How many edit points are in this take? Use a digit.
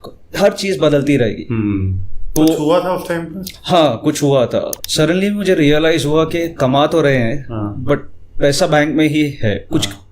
2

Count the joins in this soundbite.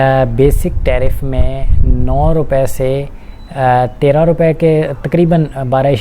0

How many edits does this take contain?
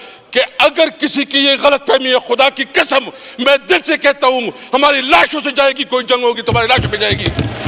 0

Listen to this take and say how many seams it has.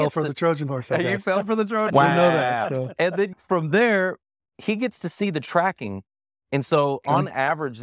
1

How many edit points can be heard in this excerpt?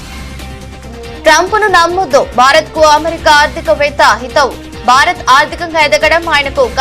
1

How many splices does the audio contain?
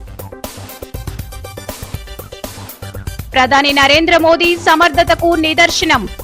0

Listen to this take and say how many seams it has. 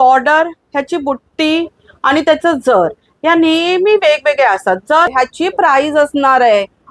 1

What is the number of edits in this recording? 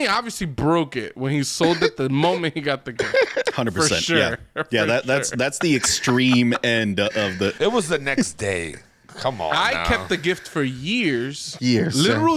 1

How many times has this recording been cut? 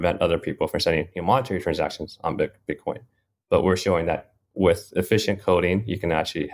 0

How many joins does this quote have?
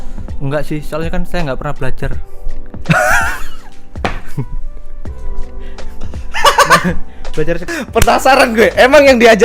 1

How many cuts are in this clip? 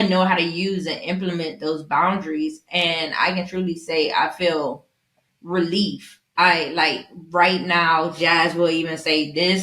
0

